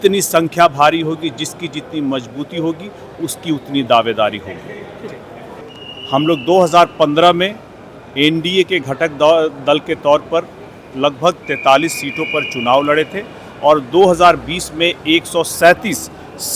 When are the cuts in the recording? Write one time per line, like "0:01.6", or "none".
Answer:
0:05.6

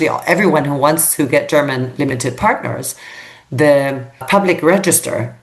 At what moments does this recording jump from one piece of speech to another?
0:04.2

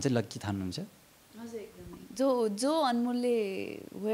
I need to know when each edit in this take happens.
none

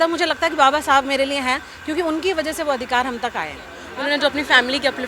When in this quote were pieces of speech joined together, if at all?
0:03.8

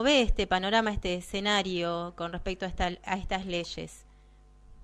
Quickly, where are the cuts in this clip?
0:02.8

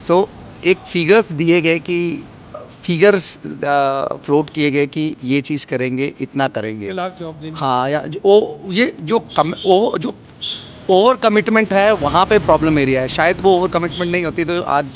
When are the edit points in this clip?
none

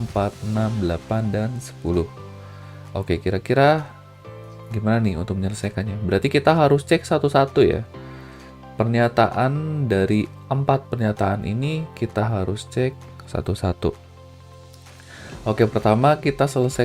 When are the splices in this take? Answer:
0:14.0
0:15.4

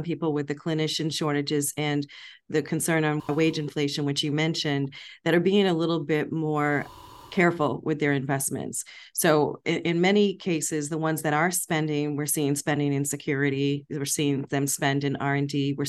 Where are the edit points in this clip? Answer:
none

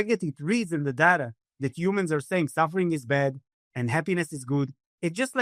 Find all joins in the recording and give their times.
none

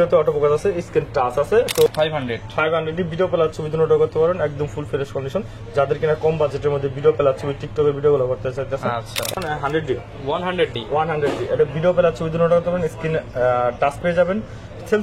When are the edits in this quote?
0:01.9
0:09.3

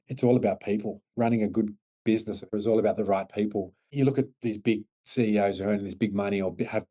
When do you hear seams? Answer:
0:01.1
0:02.5
0:03.8
0:05.0

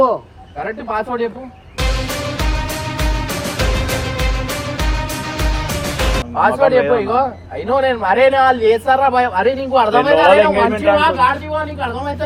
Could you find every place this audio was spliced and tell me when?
none

